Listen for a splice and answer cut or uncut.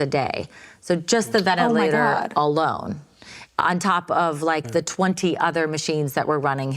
uncut